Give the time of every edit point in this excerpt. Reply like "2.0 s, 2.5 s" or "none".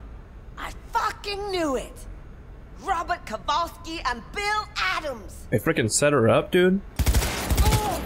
7.0 s